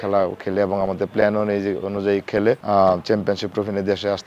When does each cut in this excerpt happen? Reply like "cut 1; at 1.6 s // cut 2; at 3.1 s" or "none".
cut 1; at 2.6 s